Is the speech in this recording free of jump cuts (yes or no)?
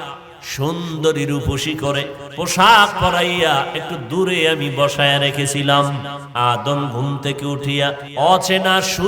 no